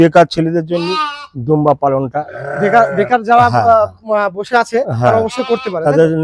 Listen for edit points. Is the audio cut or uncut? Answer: uncut